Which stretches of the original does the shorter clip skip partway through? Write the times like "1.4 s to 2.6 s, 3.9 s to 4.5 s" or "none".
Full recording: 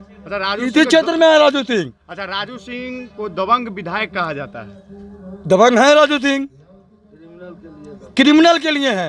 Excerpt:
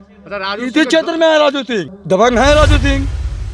1.9 s to 5.3 s